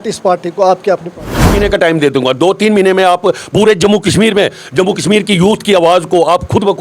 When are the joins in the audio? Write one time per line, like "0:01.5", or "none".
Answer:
0:01.5

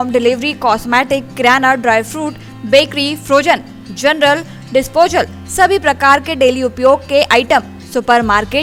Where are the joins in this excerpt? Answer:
none

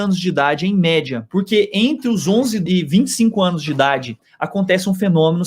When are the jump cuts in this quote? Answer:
0:01.2
0:02.6
0:04.2

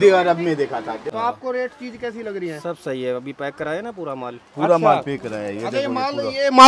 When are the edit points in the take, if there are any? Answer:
0:01.0

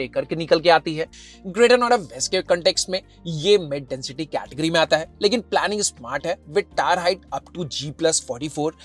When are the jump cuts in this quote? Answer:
none

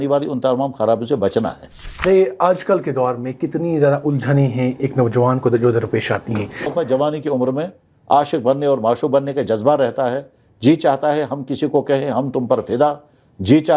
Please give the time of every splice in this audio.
0:02.0
0:06.6

